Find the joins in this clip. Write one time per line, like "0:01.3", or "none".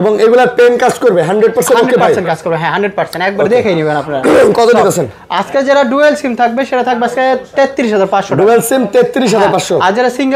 none

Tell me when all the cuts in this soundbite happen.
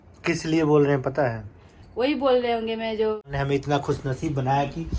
0:03.3

